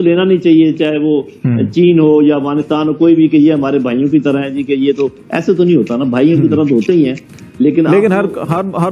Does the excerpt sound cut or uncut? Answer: uncut